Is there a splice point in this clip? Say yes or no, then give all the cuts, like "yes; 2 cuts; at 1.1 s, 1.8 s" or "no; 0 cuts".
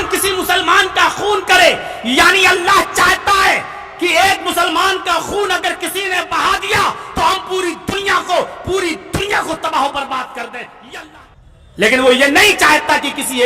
yes; 1 cut; at 11.0 s